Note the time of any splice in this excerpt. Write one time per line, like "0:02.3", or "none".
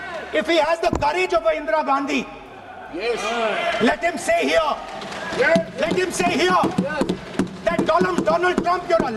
none